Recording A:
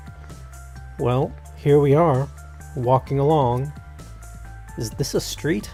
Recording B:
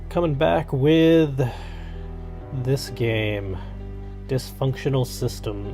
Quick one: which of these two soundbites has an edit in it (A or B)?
B